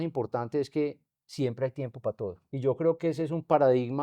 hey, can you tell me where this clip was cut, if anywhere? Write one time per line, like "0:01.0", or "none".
0:02.4